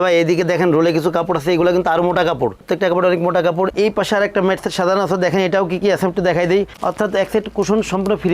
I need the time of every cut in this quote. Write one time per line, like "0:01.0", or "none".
0:03.7
0:06.7